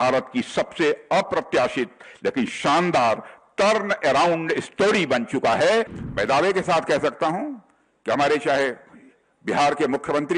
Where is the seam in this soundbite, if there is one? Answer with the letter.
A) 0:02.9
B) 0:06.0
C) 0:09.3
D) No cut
B